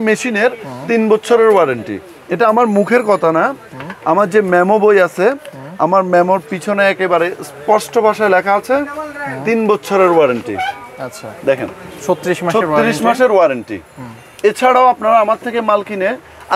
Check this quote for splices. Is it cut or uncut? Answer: uncut